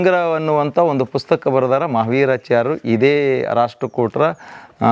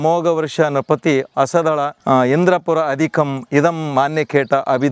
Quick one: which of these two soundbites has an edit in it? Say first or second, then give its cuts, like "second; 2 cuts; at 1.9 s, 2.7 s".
second; 1 cut; at 2.0 s